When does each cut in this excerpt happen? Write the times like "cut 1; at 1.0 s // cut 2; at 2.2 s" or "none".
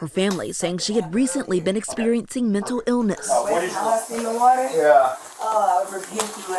cut 1; at 3.6 s